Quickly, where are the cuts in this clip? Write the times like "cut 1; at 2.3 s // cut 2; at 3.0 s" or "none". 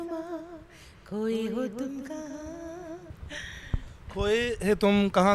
none